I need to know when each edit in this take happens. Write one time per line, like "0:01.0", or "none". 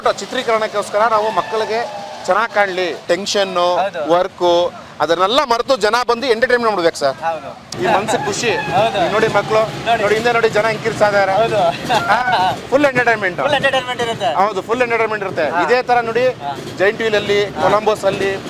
0:03.0
0:07.7